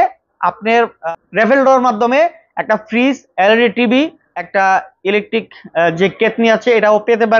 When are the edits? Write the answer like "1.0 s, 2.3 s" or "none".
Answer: 1.0 s, 4.6 s